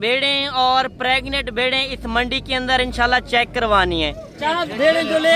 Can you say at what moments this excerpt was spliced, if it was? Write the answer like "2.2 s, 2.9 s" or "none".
4.3 s